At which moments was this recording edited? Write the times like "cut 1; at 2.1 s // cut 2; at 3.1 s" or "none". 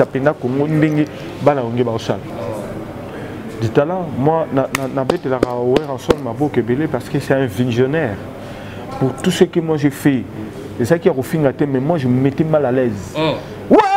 cut 1; at 2.3 s